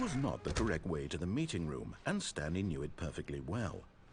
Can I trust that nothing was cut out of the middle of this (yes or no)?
yes